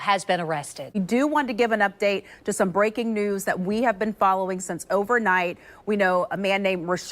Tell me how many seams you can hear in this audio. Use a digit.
1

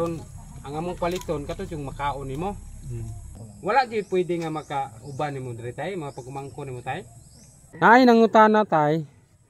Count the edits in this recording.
2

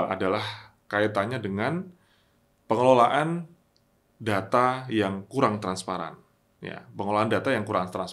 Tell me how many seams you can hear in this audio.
0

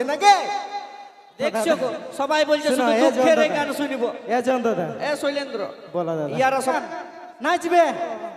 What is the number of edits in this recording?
1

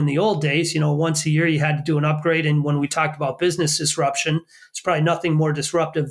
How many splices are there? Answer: 0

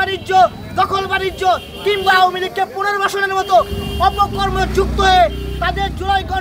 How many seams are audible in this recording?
0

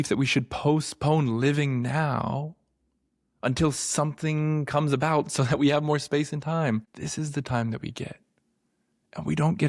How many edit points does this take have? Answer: 1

